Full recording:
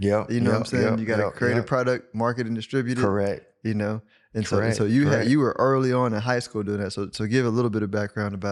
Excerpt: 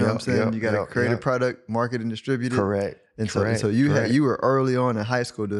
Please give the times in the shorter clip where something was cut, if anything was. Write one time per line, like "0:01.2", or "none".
0:03.0